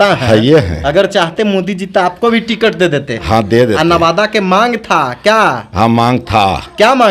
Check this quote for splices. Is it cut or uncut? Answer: uncut